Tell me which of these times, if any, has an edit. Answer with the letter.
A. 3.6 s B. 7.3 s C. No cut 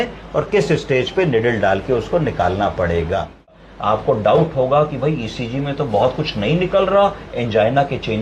A